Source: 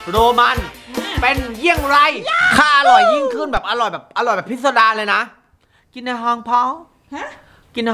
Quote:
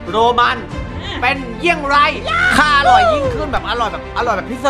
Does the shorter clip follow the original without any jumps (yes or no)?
yes